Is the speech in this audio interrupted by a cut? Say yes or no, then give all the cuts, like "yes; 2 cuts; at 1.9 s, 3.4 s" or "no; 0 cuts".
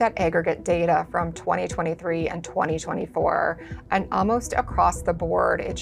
no; 0 cuts